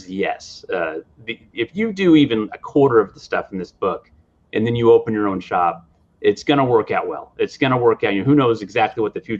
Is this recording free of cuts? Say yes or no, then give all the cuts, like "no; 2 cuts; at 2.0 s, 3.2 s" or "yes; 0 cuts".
yes; 0 cuts